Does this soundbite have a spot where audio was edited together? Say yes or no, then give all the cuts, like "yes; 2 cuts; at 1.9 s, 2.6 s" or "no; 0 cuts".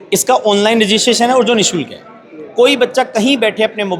no; 0 cuts